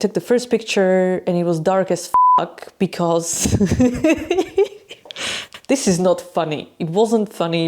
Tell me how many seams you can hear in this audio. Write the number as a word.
zero